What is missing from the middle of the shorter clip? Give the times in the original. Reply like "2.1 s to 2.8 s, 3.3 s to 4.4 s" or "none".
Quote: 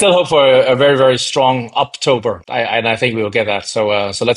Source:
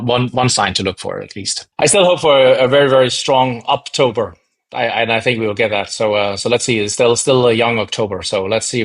4.4 s to 4.7 s